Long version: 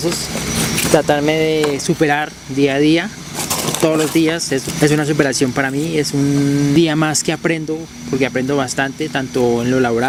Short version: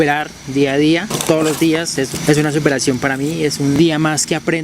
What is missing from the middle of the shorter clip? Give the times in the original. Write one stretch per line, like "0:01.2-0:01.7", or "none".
0:03.1-0:03.7
0:06.3-0:06.7